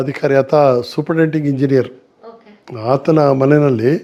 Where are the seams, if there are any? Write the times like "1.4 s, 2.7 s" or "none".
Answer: none

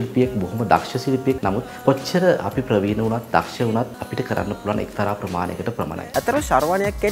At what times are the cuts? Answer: 1.4 s, 3.9 s, 6.0 s

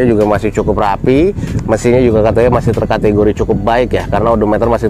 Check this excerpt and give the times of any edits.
none

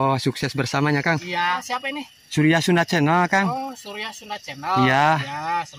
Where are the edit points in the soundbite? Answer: 1.6 s

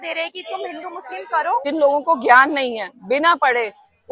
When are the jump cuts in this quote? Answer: 1.6 s

